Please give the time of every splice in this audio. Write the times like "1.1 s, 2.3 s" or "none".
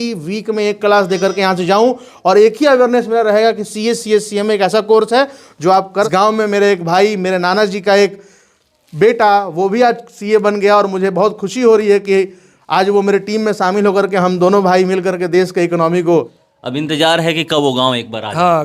6.1 s, 16.4 s